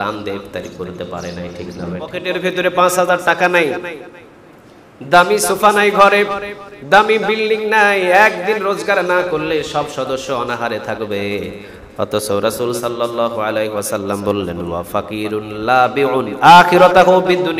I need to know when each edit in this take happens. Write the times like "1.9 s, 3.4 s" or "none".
2.2 s